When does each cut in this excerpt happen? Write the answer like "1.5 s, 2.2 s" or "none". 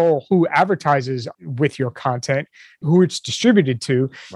1.3 s, 2.8 s